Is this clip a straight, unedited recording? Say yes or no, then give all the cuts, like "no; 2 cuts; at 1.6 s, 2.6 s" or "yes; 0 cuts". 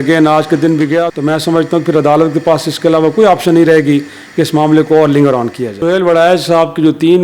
no; 2 cuts; at 1.1 s, 5.8 s